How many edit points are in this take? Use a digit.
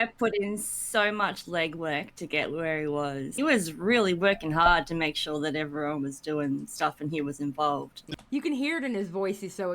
2